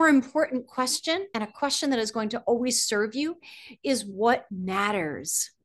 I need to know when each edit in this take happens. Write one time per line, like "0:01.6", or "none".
0:01.3